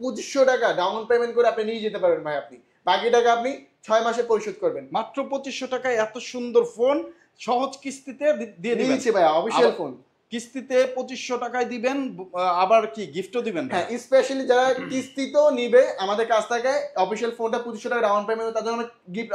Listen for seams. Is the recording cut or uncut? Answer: uncut